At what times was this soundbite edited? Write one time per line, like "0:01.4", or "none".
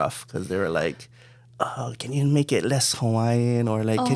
none